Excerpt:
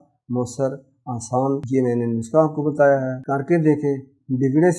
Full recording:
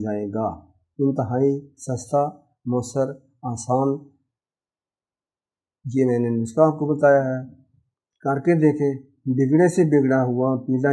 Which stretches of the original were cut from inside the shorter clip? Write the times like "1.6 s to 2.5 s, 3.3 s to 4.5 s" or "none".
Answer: 4.0 s to 5.9 s, 7.4 s to 8.1 s